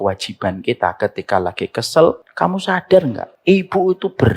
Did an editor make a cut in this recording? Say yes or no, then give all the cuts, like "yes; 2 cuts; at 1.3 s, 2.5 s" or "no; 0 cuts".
yes; 2 cuts; at 2.3 s, 3.2 s